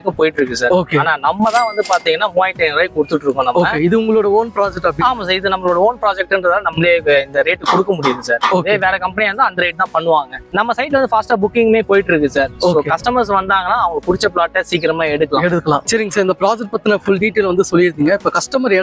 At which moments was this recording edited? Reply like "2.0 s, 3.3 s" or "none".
none